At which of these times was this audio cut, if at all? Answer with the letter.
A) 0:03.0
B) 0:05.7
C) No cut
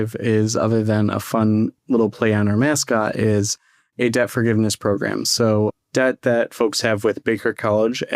B